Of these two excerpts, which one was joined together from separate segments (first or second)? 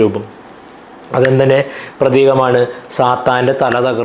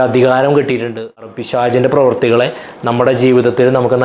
second